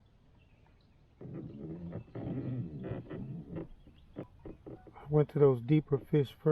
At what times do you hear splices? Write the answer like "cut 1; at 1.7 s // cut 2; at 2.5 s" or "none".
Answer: cut 1; at 4.8 s